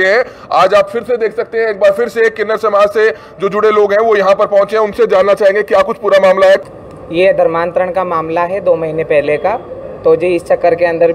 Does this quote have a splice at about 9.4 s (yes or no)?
no